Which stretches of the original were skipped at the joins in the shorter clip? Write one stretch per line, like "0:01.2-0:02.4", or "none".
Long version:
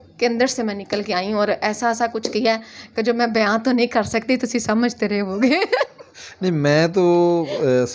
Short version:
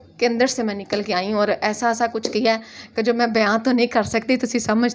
none